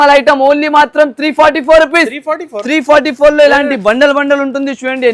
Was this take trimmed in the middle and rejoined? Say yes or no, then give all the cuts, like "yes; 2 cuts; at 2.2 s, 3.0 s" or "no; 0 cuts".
no; 0 cuts